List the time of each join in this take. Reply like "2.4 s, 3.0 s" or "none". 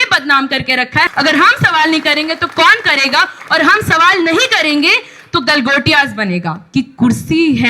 1.1 s, 6.6 s

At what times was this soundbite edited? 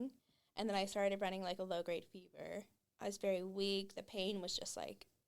2.8 s

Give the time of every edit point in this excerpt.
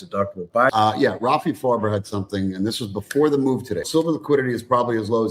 0.7 s, 3.9 s

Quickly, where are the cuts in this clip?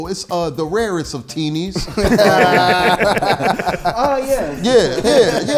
none

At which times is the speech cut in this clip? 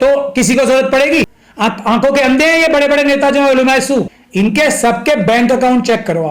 1.4 s, 4.2 s

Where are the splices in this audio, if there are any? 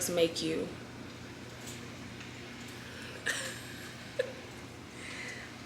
none

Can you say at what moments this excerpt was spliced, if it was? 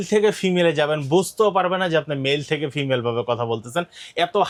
none

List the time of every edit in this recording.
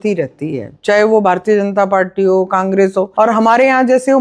3.1 s

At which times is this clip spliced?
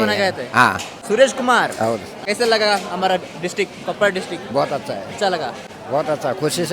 0.9 s, 2.1 s, 5.7 s

